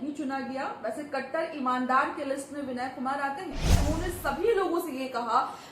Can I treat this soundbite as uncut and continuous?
no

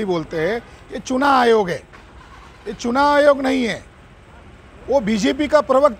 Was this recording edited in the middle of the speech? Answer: no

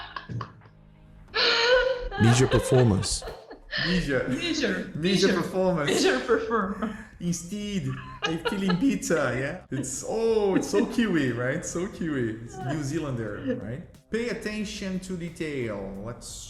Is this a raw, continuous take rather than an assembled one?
no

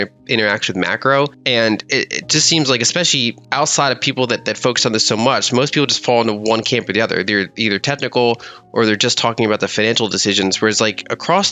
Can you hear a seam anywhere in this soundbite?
yes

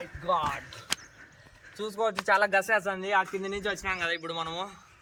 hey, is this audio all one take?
yes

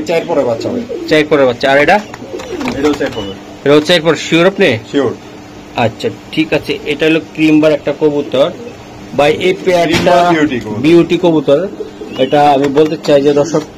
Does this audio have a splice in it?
no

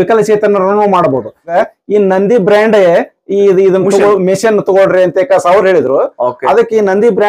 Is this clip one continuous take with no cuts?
no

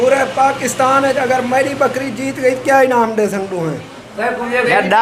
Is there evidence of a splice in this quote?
no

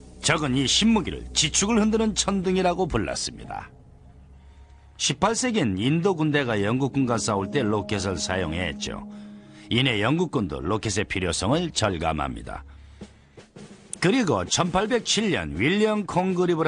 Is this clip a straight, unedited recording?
yes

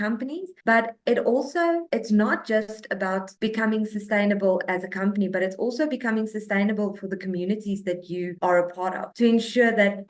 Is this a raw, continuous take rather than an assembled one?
yes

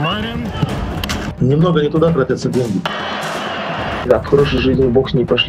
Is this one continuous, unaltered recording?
yes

